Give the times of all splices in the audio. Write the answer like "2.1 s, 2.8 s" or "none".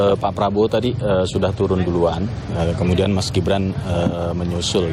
none